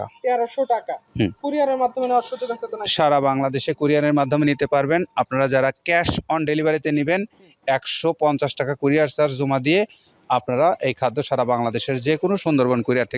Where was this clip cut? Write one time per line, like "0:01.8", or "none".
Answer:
none